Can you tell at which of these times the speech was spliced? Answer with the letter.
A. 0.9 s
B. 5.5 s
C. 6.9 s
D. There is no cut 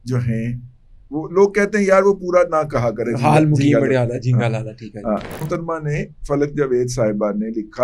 B